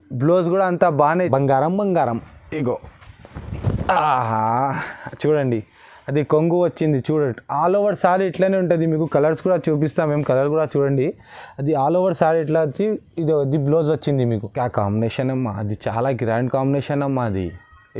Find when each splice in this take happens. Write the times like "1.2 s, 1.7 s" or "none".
1.1 s, 14.5 s

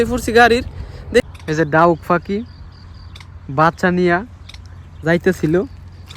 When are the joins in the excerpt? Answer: 1.2 s

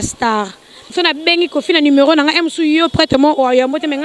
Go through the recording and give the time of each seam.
0.9 s

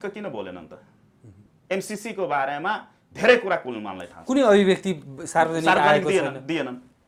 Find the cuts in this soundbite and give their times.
none

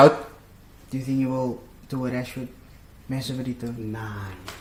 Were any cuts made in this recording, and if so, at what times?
none

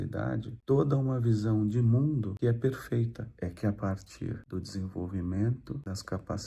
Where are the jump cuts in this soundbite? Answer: 3.3 s

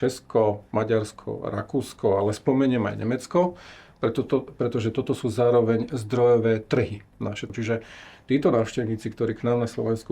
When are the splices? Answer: 7.5 s

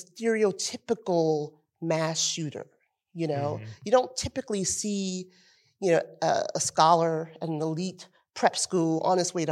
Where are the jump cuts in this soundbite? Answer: none

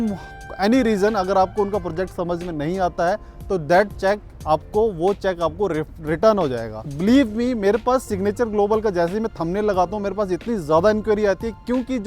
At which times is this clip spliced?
6.9 s

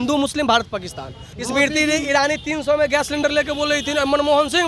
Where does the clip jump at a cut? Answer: 1.3 s

